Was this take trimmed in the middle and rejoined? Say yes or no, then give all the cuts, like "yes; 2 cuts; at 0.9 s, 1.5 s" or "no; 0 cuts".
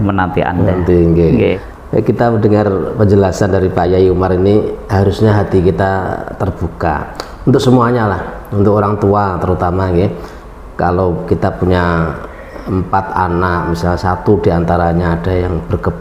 yes; 1 cut; at 1.6 s